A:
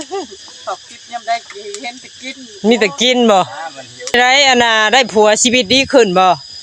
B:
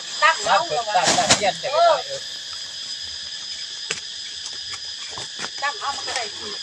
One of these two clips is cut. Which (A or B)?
A